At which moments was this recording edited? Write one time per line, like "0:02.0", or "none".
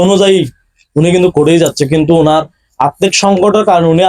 none